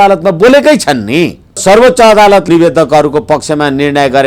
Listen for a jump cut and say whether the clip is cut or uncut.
cut